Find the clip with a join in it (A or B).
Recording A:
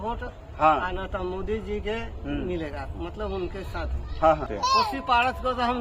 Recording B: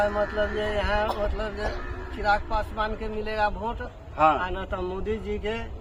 A